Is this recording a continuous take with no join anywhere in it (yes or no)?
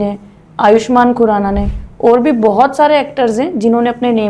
yes